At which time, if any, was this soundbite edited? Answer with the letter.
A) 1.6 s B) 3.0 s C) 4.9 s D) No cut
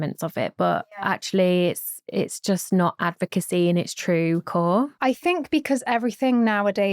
C